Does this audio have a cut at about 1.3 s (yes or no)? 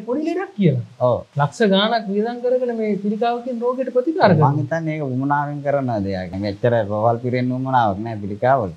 yes